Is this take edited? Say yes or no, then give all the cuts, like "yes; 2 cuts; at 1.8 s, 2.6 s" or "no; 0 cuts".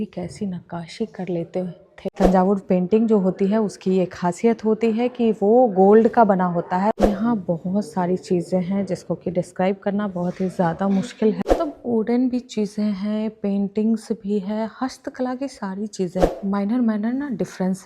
yes; 4 cuts; at 1.9 s, 6.9 s, 11.4 s, 16.3 s